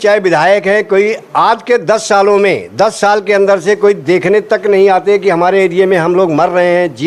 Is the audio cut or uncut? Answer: uncut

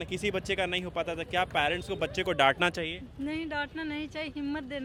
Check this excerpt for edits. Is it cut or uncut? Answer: uncut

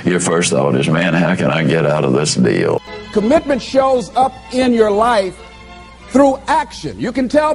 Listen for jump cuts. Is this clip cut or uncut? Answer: cut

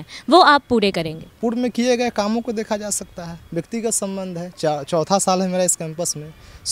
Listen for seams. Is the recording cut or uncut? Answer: cut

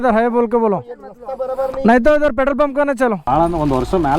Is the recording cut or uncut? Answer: cut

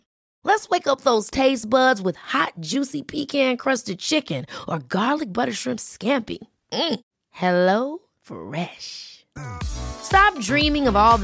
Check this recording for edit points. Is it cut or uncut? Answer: uncut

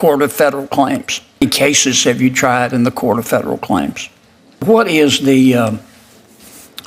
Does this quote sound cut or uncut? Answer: cut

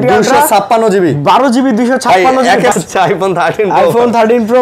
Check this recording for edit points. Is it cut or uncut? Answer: cut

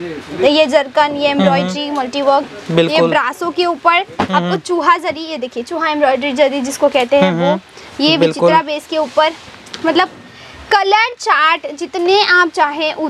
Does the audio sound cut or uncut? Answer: uncut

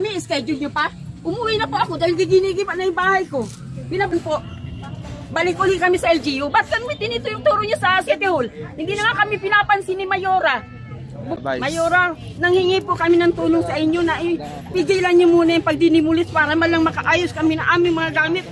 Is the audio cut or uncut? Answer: cut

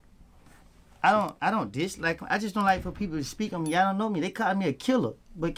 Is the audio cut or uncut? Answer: uncut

